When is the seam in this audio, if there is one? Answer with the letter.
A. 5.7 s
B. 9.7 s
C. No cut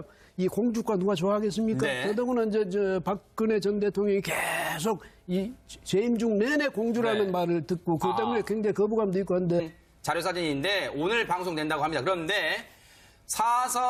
C